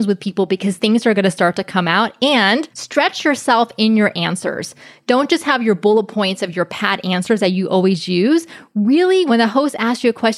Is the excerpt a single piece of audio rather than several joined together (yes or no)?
no